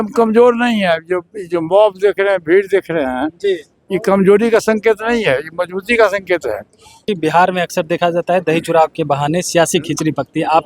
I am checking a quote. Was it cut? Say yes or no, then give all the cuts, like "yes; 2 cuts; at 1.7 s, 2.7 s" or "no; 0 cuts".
yes; 1 cut; at 7.1 s